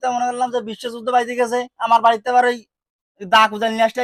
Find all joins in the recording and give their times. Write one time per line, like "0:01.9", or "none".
none

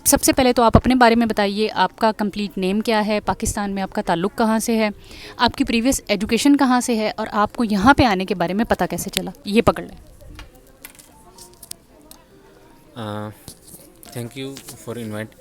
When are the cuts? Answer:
none

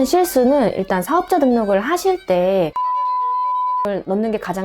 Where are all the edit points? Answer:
none

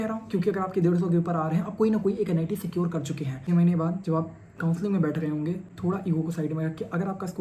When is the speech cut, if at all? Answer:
0:03.4
0:05.7

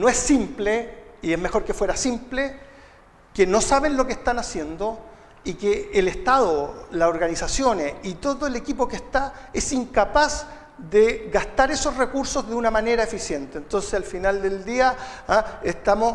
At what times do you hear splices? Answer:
0:05.6

